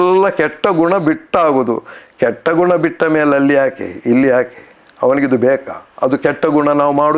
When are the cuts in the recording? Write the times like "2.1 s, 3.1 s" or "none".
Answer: none